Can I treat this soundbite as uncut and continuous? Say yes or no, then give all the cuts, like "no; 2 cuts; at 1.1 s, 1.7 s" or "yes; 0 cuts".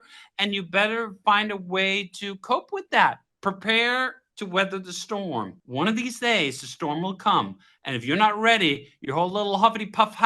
no; 2 cuts; at 3.3 s, 5.6 s